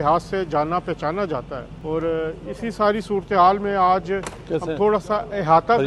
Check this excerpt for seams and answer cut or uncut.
uncut